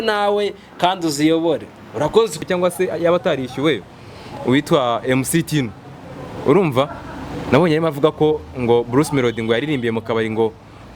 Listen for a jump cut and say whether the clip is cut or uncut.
cut